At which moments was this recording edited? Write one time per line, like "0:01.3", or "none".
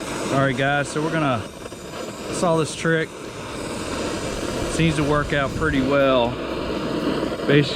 none

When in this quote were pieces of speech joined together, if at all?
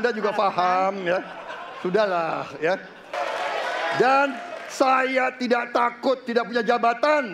0:03.1

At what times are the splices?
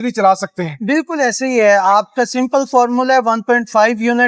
none

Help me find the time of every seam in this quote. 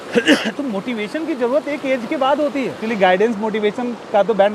0:02.8

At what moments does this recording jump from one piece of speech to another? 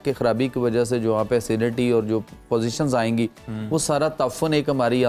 none

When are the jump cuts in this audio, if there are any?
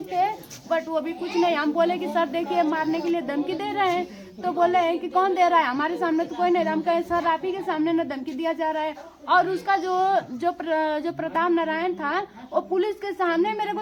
none

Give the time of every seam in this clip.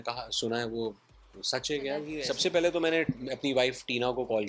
0:02.1

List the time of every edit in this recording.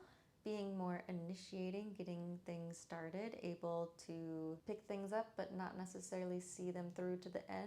0:04.6

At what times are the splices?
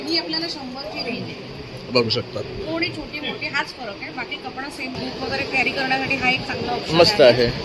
0:05.0

